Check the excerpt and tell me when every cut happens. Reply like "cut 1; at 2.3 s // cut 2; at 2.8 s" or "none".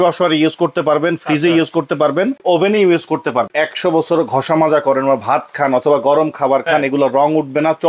cut 1; at 2.4 s // cut 2; at 3.5 s